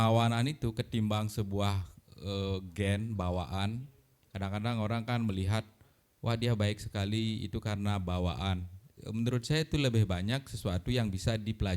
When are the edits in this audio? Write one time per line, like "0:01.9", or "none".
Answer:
none